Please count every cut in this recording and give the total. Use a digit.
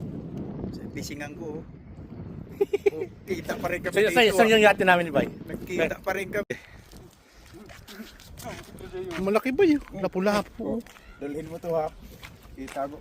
1